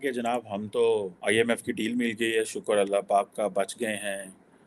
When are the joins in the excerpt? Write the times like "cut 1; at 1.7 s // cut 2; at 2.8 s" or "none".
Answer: cut 1; at 1.1 s